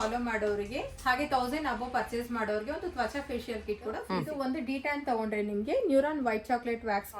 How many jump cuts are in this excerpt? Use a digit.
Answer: 1